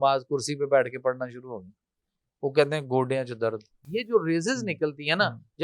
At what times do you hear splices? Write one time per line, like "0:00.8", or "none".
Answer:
0:03.8